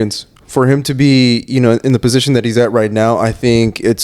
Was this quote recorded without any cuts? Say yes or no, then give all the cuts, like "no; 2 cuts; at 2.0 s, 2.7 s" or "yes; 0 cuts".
yes; 0 cuts